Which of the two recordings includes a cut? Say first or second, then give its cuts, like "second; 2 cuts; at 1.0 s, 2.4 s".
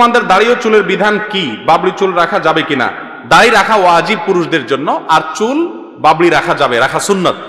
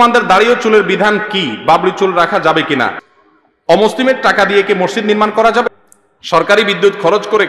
second; 2 cuts; at 3.1 s, 5.6 s